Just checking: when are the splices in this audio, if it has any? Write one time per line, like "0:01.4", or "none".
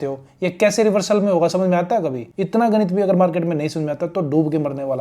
0:02.2